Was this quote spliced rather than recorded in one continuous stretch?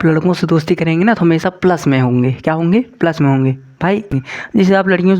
yes; 1 cut; at 4.2 s

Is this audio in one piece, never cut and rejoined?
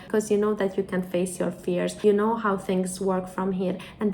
no; 1 cut; at 1.9 s

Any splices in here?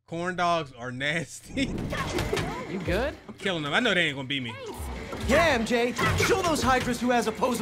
yes; 1 cut; at 1.9 s

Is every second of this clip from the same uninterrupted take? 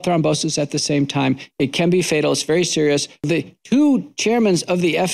no; 1 cut; at 3.2 s

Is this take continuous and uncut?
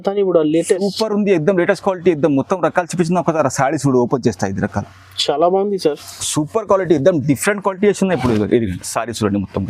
yes; 0 cuts

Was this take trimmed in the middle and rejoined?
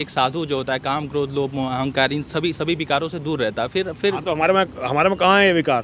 no; 0 cuts

